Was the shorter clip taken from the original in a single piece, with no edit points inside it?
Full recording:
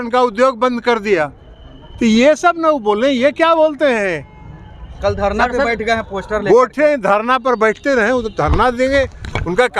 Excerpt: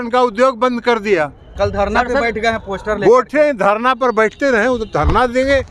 no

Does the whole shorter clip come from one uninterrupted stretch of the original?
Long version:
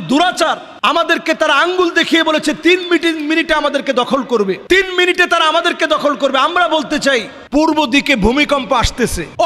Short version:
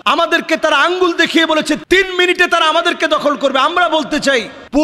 no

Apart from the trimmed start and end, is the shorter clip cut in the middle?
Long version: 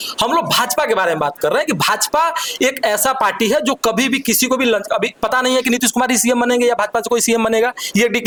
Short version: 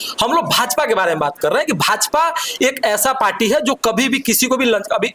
no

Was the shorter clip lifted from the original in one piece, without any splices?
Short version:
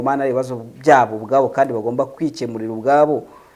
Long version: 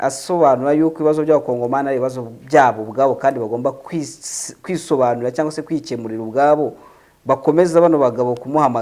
no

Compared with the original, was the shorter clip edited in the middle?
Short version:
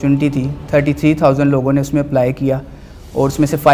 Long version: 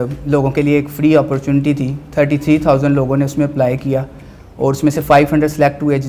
no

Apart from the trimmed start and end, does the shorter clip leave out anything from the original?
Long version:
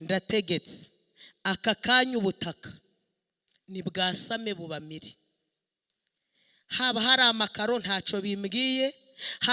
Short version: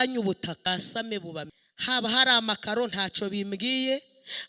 yes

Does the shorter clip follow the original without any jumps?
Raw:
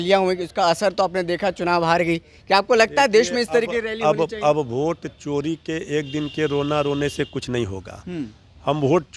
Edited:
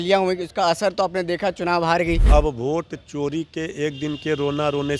no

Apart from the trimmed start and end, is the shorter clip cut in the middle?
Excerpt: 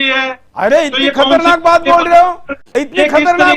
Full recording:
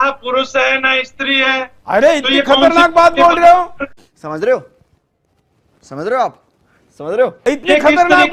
yes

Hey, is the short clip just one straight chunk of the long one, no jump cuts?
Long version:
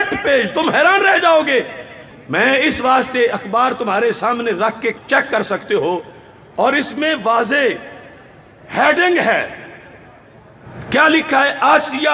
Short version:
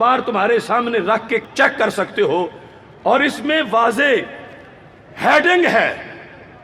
yes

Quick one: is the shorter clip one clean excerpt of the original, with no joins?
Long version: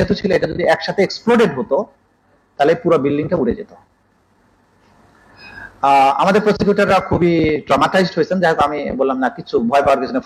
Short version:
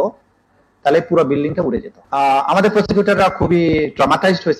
no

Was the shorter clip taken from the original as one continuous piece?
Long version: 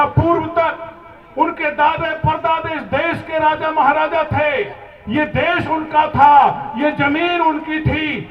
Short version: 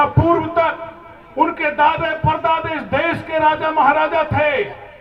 yes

